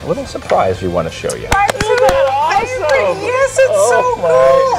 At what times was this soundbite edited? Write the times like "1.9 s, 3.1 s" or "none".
1.5 s